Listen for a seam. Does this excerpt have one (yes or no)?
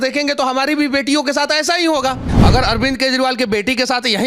yes